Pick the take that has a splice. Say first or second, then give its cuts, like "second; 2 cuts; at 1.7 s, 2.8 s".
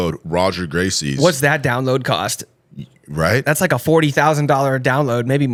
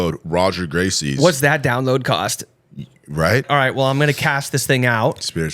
second; 1 cut; at 3.4 s